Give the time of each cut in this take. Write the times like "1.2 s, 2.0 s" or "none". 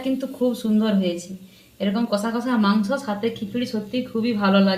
none